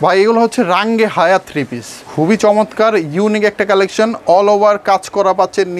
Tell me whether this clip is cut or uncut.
cut